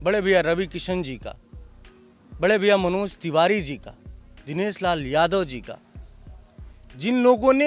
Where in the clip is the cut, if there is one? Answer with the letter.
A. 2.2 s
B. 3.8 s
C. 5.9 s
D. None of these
D